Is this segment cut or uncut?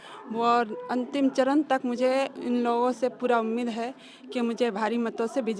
uncut